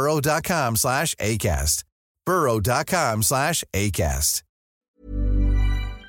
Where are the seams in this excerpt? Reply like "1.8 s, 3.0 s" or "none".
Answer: 4.9 s